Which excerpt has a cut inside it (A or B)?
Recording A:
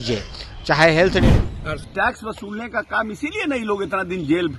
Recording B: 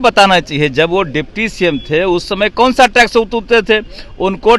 A